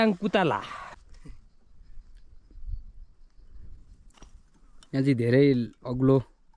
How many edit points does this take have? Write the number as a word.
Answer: one